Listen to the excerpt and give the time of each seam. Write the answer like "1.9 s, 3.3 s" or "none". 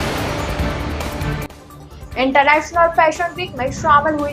1.5 s